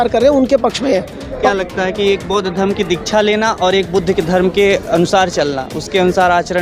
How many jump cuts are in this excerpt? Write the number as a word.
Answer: one